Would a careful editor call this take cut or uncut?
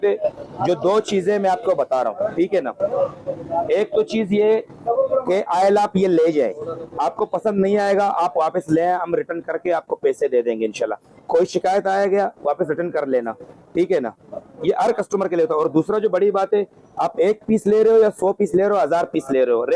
uncut